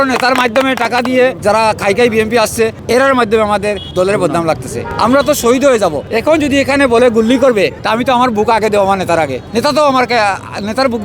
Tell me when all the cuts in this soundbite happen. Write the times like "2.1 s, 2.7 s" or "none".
1.4 s, 2.8 s, 3.8 s, 4.9 s, 6.1 s, 7.8 s, 9.4 s